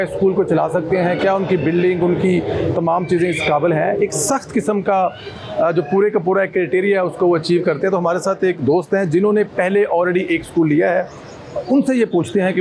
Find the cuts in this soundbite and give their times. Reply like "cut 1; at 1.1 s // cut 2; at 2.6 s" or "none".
none